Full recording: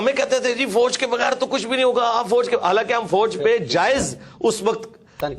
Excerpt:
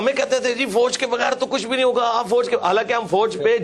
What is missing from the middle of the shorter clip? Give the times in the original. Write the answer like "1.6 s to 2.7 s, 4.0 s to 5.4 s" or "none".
none